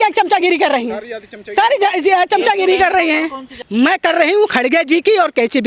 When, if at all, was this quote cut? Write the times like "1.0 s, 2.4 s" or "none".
3.6 s